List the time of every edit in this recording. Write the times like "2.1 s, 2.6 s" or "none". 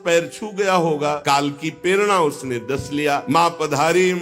1.2 s, 3.2 s